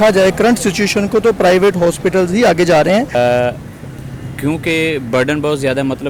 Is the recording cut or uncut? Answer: cut